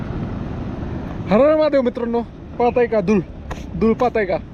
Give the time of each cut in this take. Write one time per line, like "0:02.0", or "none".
none

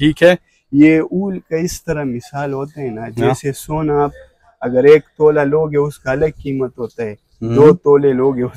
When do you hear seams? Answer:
none

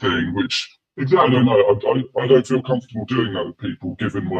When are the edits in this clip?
none

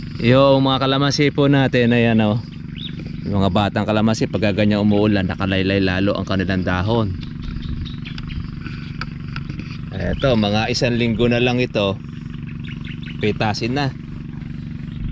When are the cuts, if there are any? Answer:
none

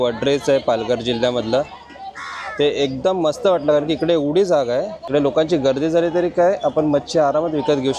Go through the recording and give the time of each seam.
none

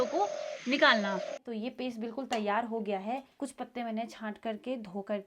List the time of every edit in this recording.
0:01.4
0:03.4

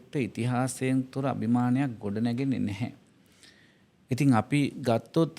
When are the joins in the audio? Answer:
none

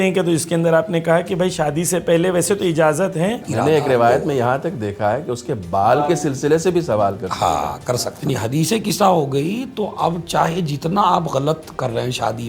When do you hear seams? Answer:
0:03.5
0:08.1

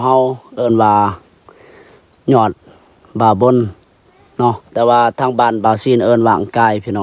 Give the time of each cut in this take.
none

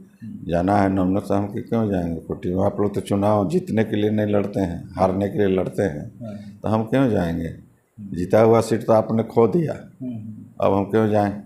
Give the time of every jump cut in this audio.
none

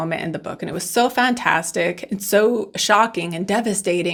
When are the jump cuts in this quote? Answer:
none

